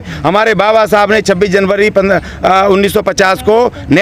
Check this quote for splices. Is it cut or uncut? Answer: uncut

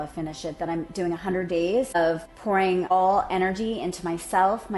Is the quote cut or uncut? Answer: cut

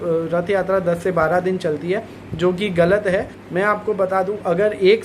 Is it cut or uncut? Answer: cut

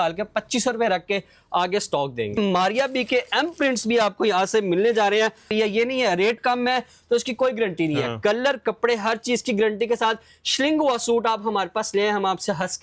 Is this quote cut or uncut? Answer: cut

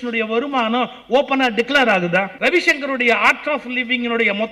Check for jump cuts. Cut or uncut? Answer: cut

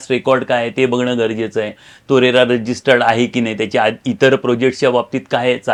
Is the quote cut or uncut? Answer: uncut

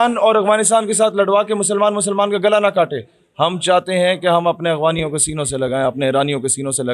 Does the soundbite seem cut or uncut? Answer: uncut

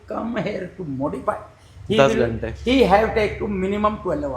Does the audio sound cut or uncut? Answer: uncut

